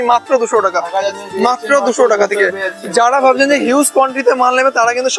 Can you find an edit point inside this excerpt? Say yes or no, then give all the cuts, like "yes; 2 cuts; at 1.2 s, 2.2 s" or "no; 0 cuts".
no; 0 cuts